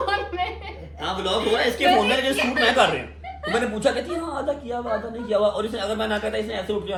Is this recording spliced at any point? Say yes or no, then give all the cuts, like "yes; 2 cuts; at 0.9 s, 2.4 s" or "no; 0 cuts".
no; 0 cuts